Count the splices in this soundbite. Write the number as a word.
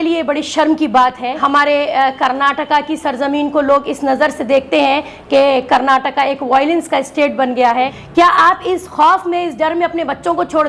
two